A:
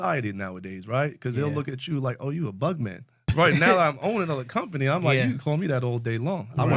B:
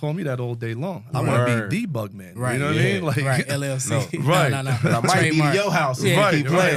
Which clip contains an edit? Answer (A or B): A